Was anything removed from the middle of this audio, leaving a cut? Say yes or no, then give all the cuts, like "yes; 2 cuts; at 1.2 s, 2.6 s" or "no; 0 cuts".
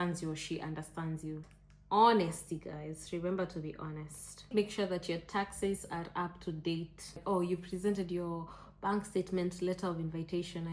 yes; 3 cuts; at 1.5 s, 4.5 s, 7.2 s